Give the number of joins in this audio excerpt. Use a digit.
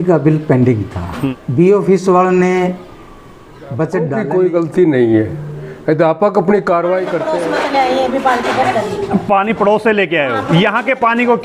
3